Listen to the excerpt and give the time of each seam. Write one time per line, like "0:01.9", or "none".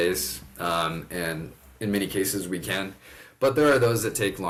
none